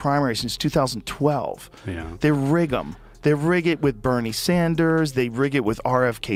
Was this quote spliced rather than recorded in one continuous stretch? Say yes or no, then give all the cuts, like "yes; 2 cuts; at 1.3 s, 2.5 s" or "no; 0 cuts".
no; 0 cuts